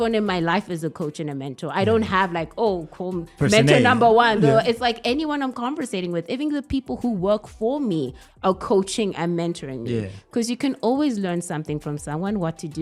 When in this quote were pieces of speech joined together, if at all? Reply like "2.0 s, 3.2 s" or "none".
none